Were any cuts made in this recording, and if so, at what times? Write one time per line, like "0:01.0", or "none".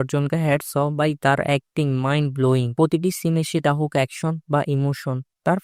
none